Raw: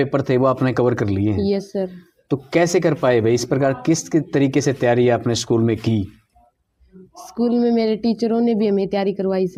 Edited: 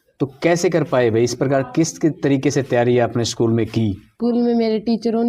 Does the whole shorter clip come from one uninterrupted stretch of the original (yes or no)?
no